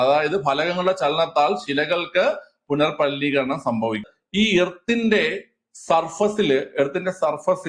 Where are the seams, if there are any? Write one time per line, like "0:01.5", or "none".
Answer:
0:04.1